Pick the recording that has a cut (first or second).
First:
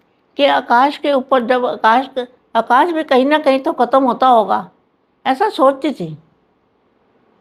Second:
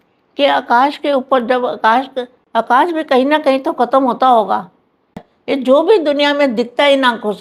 second